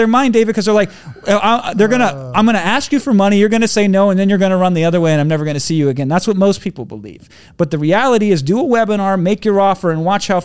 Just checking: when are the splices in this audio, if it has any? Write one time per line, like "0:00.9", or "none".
none